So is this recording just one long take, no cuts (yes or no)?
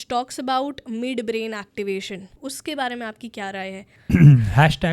no